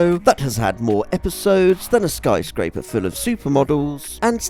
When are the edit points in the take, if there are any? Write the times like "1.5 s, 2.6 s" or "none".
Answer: none